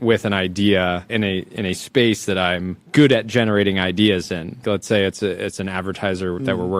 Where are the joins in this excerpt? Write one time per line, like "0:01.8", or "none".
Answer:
0:01.1
0:02.8
0:04.6